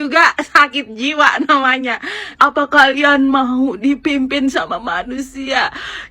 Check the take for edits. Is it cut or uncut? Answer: cut